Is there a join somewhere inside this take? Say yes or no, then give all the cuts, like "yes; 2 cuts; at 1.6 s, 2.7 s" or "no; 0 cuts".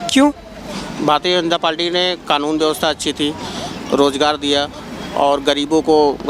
no; 0 cuts